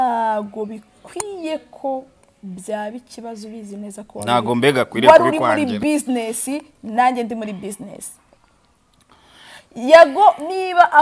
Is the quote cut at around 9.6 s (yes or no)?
no